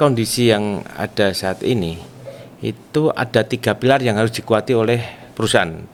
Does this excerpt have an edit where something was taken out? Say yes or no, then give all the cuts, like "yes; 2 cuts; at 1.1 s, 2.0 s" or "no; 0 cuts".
no; 0 cuts